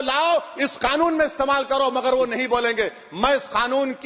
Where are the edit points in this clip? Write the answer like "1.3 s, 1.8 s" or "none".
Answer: none

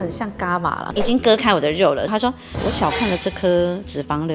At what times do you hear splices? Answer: 0.9 s, 2.1 s

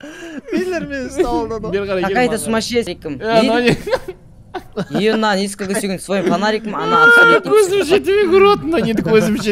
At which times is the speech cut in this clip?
2.9 s

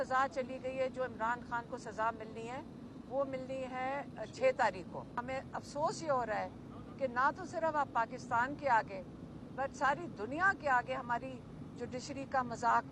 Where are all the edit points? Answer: 5.2 s

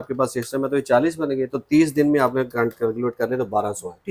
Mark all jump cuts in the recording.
none

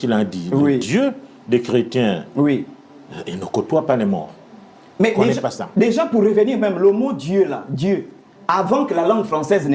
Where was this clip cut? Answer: none

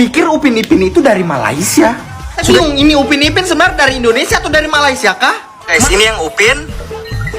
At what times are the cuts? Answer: 2.4 s, 5.8 s

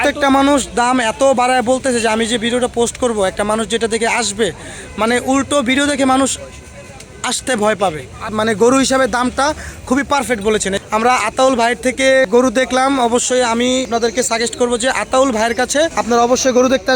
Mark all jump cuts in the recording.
8.3 s, 10.8 s, 12.3 s, 13.9 s, 16.0 s

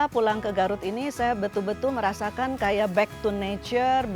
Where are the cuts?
none

